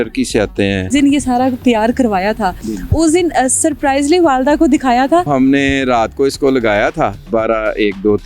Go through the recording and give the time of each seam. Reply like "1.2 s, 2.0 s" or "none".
0.9 s, 5.3 s, 7.3 s